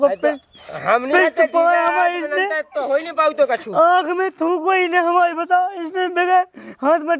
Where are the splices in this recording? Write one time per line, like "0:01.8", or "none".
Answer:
none